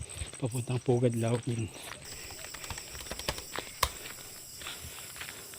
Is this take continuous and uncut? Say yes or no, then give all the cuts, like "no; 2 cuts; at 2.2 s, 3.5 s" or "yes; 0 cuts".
no; 1 cut; at 2.1 s